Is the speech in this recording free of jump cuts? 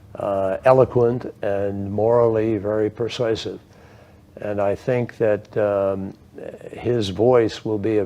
no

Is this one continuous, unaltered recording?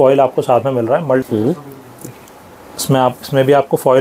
no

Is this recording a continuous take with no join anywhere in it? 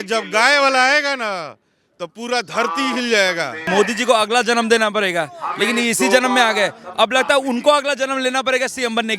no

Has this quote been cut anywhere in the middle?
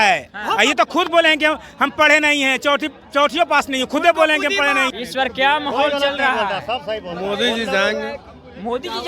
yes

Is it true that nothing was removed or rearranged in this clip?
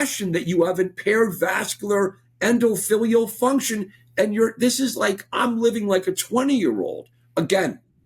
yes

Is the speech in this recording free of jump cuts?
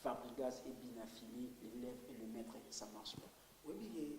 no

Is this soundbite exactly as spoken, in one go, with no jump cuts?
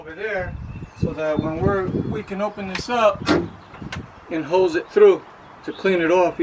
yes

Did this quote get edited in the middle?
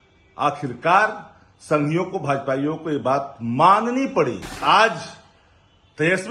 yes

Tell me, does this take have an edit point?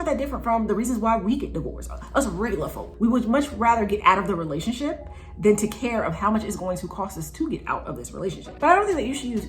yes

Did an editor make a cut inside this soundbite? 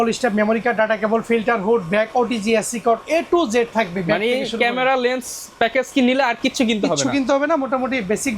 no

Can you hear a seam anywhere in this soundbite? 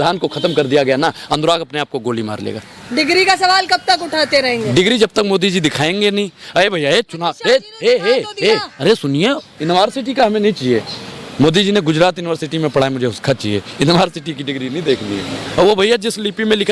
no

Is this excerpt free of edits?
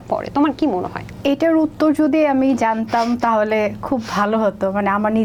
yes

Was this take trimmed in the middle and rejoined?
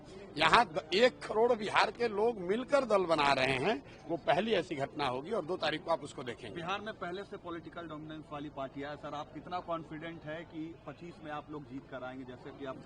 no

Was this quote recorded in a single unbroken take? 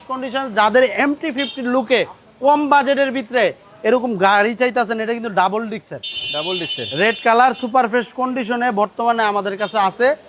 yes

